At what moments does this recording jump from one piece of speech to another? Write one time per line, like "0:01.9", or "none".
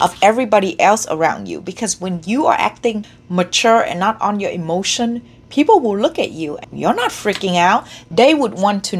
0:03.1
0:06.6
0:08.0